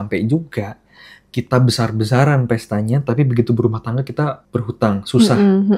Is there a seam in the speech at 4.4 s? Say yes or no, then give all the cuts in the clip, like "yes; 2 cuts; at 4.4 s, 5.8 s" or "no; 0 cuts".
no; 0 cuts